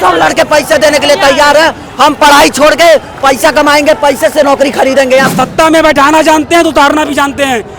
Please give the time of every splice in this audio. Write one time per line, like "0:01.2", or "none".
0:05.3